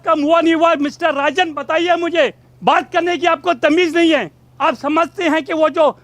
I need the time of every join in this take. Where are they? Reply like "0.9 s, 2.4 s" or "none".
2.5 s, 4.4 s